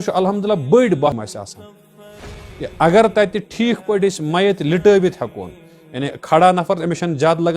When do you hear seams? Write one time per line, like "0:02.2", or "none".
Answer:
0:01.1